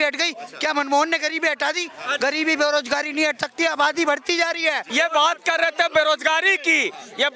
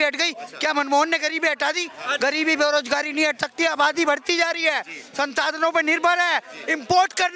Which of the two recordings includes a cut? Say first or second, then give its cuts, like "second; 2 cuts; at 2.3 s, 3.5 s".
first; 1 cut; at 4.8 s